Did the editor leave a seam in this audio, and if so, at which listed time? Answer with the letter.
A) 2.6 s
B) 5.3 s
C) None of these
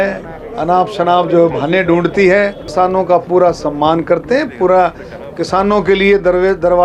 A